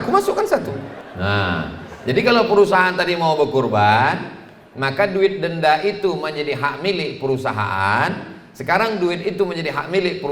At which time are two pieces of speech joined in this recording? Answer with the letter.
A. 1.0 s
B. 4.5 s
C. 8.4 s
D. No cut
A